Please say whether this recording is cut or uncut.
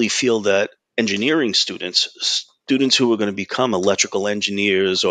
uncut